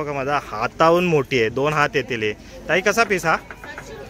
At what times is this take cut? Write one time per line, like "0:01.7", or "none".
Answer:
none

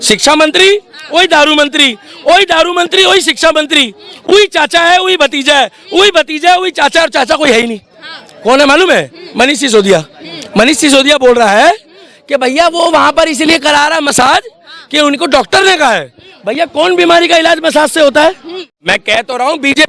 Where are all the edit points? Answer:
0:18.7

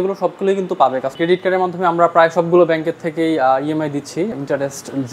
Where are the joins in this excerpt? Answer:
0:01.1
0:04.3

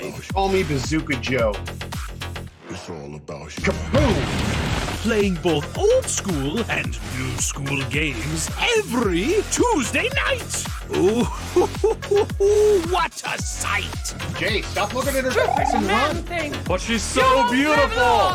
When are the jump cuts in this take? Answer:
none

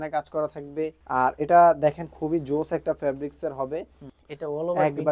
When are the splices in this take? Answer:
0:01.0
0:04.2

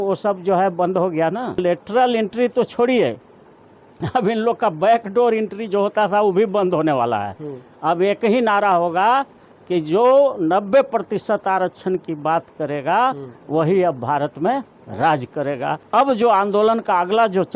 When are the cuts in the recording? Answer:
0:01.6
0:15.7

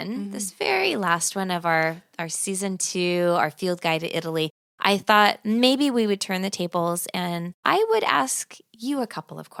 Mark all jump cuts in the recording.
none

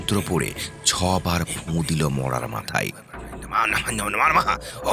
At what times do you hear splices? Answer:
0:03.5

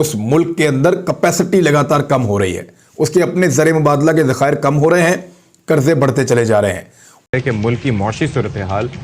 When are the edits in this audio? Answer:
0:07.2

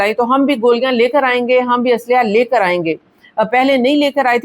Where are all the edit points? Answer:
none

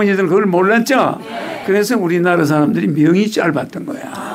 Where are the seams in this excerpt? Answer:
none

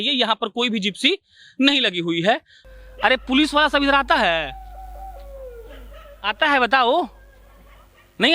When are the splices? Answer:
0:02.5

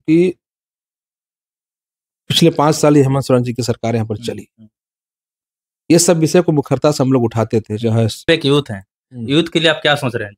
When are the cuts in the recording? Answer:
0:08.2

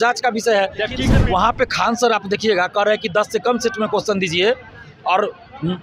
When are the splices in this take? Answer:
0:01.1

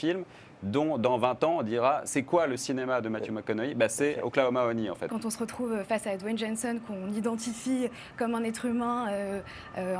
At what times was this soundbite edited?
0:05.1

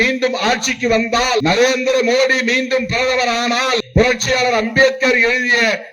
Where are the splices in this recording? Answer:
0:01.4
0:03.8

